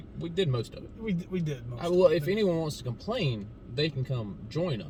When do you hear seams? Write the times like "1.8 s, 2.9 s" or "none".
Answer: none